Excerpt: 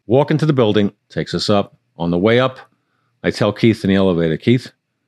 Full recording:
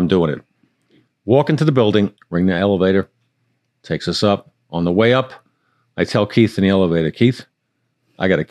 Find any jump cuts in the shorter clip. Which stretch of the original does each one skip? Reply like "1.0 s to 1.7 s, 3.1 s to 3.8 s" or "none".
2.2 s to 3.8 s